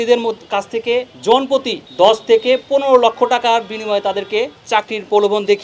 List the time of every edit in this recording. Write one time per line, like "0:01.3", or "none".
0:01.1
0:01.8
0:04.6

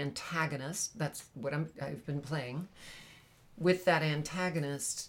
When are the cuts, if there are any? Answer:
0:01.7

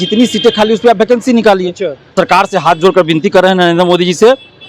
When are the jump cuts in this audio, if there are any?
0:02.1

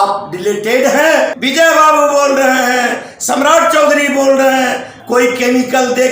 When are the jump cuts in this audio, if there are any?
0:01.4
0:04.9

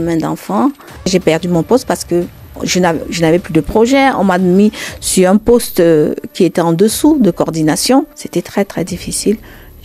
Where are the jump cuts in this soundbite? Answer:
0:01.1
0:08.2

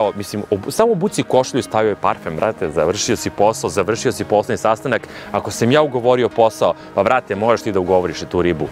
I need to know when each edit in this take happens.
none

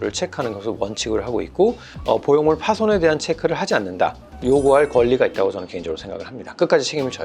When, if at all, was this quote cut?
0:01.9
0:04.3

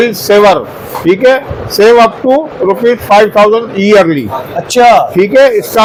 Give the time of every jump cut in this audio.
none

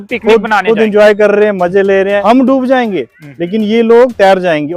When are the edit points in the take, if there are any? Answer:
0:02.2

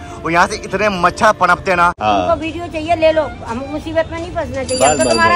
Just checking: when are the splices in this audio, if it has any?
0:02.0

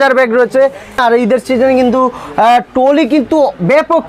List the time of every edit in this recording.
0:01.0

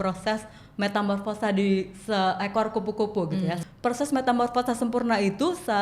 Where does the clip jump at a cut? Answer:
0:03.6

